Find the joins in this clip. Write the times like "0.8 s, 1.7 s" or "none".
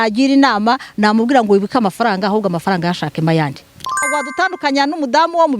4.0 s